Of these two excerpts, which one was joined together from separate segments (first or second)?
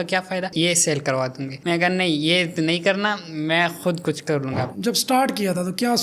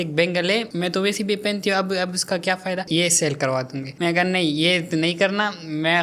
first